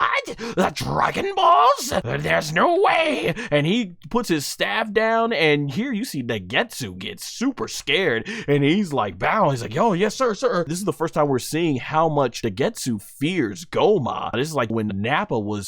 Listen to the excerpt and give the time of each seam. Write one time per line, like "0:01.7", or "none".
0:02.1
0:10.7
0:12.4
0:14.7